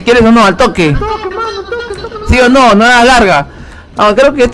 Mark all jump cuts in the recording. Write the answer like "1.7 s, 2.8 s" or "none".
none